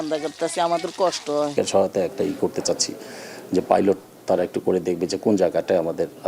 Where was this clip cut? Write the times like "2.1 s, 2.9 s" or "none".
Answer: 1.5 s